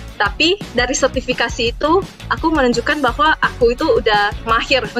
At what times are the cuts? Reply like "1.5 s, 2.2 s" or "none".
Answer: 3.4 s